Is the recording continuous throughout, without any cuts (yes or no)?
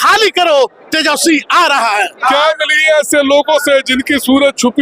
no